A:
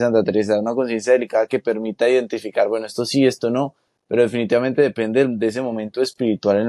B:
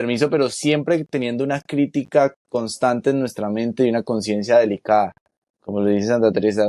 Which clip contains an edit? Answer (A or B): B